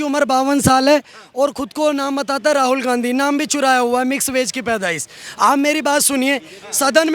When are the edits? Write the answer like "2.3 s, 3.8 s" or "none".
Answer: none